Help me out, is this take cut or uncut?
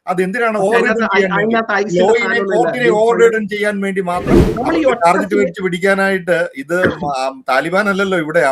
cut